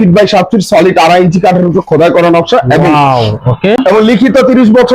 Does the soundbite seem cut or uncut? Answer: cut